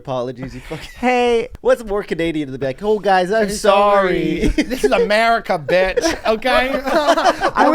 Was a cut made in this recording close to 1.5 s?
yes; 1 cut; at 1.5 s

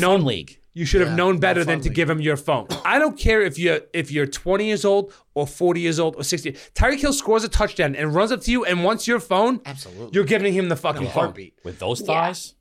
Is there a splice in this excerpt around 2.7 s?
yes; 1 cut; at 2.7 s

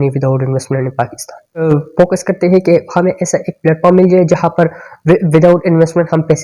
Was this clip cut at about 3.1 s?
no; 1 cut; at 1.6 s

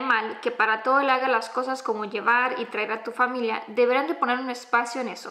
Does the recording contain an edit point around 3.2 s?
no; 0 cuts

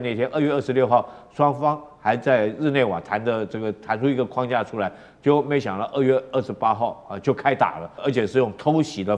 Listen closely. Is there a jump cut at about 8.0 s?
yes; 1 cut; at 8.0 s

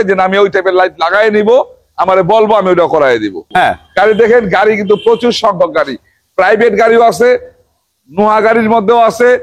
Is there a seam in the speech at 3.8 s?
yes; 1 cut; at 3.8 s

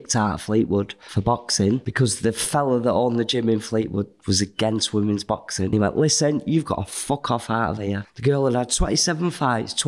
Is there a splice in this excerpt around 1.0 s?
yes; 4 cuts; at 1.0 s, 1.9 s, 5.7 s, 8.1 s

